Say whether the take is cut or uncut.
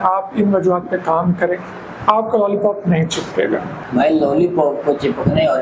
uncut